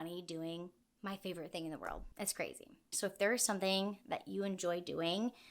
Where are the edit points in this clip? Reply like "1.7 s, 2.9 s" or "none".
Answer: 2.8 s